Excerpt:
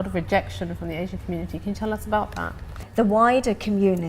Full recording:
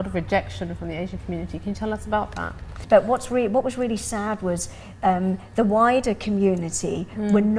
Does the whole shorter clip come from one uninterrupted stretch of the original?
no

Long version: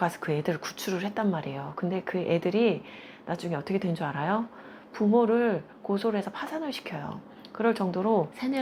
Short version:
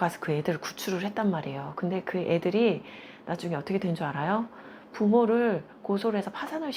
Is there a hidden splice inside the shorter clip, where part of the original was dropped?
no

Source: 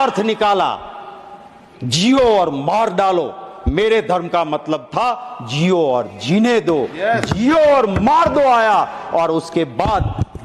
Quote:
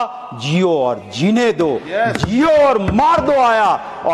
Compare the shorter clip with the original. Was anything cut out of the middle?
no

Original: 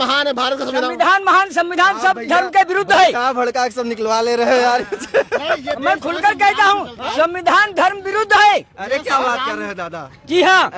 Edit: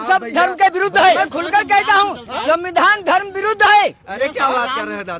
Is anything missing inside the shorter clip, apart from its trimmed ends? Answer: yes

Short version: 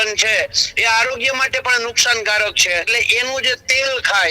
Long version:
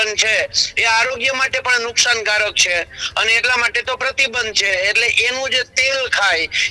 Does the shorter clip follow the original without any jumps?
no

